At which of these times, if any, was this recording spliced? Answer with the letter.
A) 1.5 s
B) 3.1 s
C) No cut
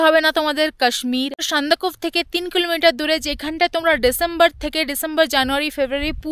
A